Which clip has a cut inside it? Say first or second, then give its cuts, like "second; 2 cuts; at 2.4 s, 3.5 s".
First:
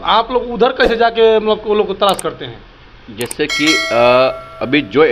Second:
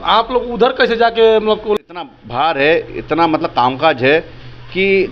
second; 1 cut; at 1.9 s